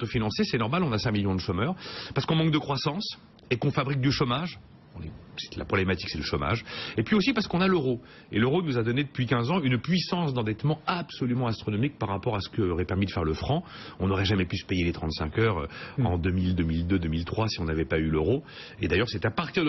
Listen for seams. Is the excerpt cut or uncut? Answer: cut